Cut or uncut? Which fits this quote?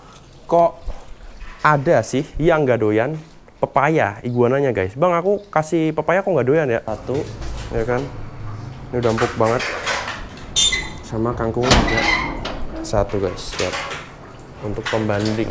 cut